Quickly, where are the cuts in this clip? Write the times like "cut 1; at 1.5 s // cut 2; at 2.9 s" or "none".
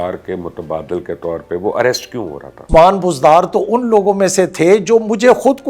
cut 1; at 2.7 s